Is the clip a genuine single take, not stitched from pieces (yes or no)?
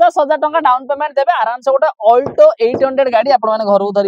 yes